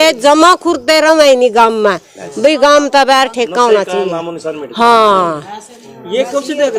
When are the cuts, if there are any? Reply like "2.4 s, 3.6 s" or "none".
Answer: none